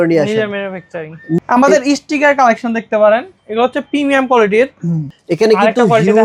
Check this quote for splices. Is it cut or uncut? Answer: cut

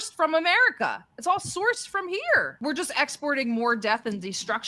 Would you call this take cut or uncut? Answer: cut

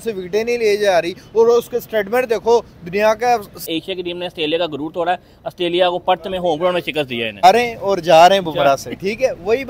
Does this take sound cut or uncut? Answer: cut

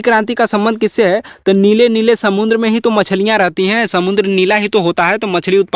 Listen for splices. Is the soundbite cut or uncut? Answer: uncut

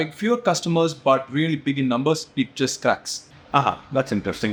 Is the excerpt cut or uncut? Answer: uncut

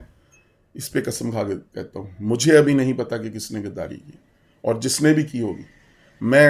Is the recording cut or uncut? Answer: uncut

